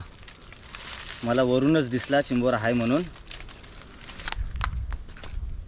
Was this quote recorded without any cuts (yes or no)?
no